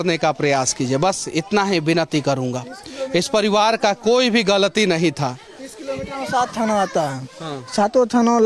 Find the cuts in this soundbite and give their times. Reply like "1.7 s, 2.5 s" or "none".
none